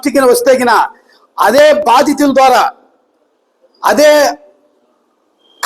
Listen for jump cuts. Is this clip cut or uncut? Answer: uncut